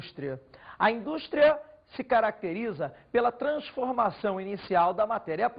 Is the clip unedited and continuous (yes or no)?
yes